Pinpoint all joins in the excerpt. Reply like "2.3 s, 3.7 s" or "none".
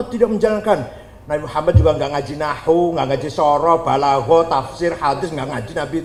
none